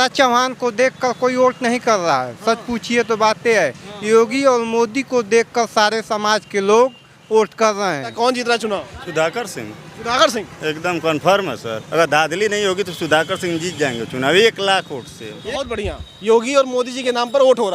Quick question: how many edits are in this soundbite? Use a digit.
2